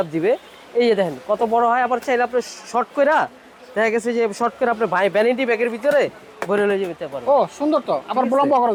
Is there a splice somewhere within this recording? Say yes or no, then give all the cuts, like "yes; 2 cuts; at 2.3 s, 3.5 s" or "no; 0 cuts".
no; 0 cuts